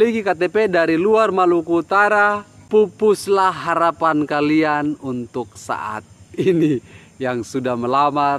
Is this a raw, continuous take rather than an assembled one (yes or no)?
no